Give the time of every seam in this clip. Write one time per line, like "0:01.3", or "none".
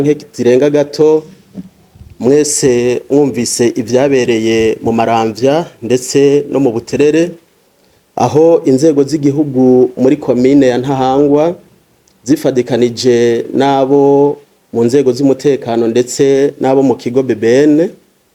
none